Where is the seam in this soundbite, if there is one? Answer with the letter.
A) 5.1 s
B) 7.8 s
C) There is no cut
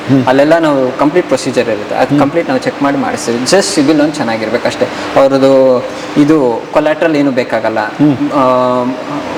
C